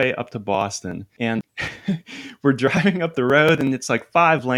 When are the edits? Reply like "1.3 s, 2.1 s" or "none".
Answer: 1.3 s